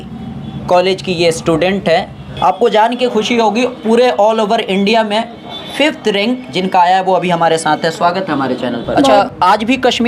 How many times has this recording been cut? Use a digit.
2